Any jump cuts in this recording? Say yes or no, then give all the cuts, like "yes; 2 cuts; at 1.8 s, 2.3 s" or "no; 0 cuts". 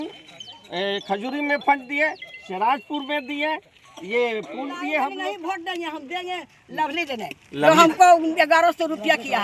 yes; 1 cut; at 5.1 s